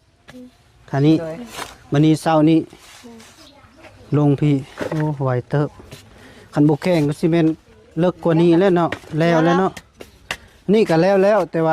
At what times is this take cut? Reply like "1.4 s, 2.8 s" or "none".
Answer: none